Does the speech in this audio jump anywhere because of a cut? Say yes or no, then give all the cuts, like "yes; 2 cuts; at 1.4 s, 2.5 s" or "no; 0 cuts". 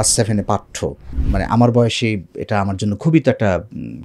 yes; 1 cut; at 1.1 s